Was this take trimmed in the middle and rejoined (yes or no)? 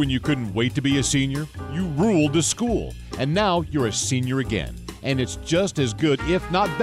no